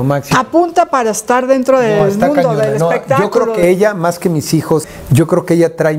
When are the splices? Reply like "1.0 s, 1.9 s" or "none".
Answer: 4.9 s